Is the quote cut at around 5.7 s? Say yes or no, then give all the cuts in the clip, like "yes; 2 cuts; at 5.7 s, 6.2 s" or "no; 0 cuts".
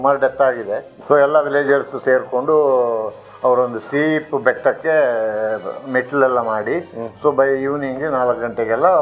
no; 1 cut; at 0.9 s